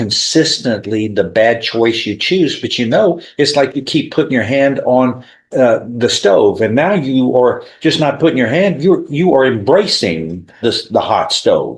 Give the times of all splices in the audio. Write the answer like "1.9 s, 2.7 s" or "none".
none